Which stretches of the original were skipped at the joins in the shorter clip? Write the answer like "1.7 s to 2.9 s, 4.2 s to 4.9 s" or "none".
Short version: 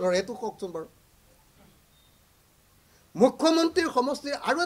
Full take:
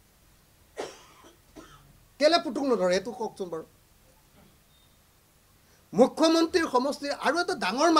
none